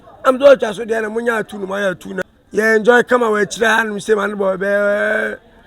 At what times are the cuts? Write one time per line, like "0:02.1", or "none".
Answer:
0:02.1